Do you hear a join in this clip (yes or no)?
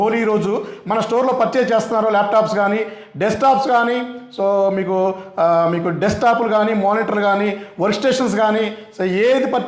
no